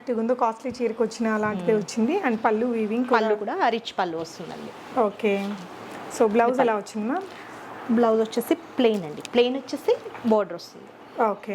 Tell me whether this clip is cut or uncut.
uncut